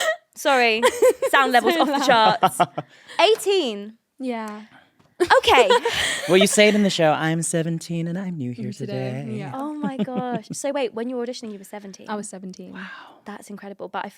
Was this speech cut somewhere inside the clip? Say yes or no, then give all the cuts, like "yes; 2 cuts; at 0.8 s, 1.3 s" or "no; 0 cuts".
no; 0 cuts